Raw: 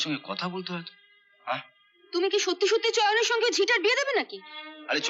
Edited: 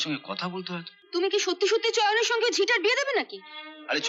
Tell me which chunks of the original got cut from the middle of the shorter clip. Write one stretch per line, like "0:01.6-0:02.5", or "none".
0:00.9-0:01.9